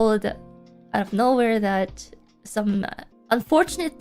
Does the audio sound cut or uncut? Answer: cut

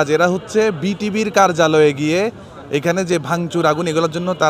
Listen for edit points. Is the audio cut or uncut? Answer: uncut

